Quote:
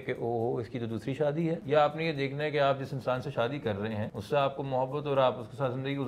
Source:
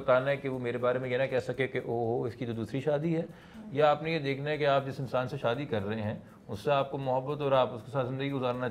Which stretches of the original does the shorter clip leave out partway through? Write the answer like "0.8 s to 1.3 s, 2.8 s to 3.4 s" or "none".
3.3 s to 3.7 s, 6.2 s to 6.5 s